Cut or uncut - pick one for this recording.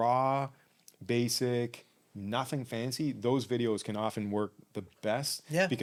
uncut